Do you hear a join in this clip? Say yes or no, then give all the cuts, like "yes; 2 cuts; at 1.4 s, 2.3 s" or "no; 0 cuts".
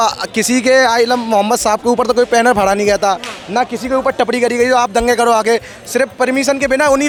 no; 0 cuts